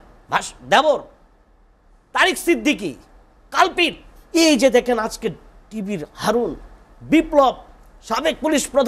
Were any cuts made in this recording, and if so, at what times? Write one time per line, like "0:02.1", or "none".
0:04.1